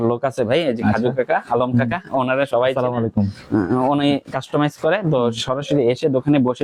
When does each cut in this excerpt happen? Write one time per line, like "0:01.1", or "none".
none